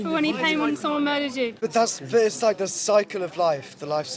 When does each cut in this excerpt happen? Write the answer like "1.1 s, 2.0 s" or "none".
1.6 s